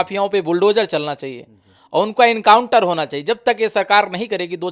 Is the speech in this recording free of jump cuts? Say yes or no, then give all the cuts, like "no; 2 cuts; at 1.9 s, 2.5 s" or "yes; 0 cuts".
yes; 0 cuts